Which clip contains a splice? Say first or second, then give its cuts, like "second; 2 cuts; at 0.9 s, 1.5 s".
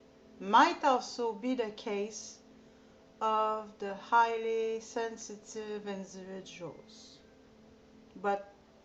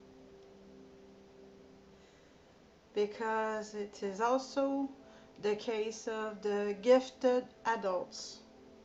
first; 1 cut; at 1.3 s